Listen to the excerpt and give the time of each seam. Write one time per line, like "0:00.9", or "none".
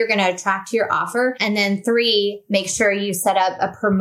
0:01.4

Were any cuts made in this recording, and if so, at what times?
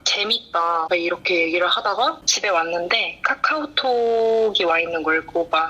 0:02.3

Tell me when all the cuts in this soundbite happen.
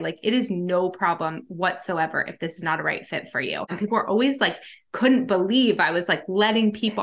0:03.7

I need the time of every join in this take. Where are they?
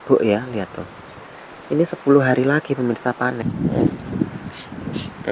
0:03.4

